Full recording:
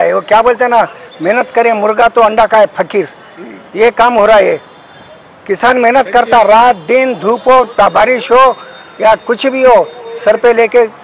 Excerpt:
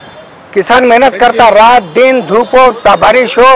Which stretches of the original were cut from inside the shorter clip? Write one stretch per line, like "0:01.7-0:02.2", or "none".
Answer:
none